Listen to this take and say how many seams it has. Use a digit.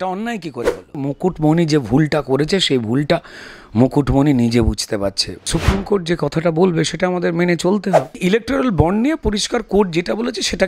3